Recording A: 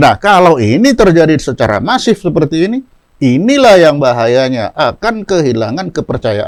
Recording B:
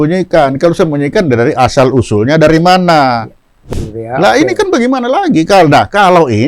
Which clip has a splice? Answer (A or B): B